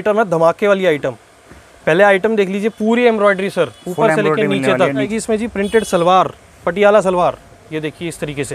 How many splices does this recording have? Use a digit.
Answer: 1